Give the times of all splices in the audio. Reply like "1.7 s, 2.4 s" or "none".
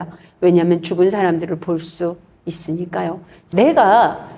3.3 s